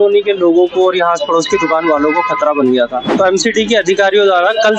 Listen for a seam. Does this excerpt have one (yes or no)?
yes